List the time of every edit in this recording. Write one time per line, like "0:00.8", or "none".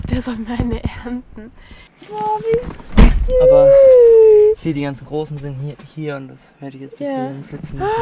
0:01.9